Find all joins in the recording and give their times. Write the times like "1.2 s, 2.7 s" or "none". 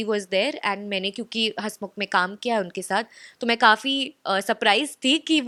none